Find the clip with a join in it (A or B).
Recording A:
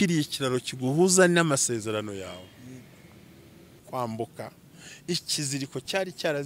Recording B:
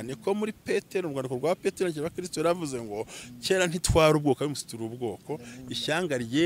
A